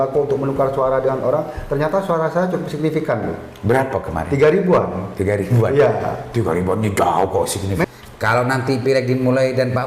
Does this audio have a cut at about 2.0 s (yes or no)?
no